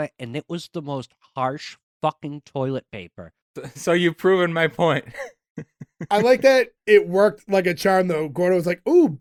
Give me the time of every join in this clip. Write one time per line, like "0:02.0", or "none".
none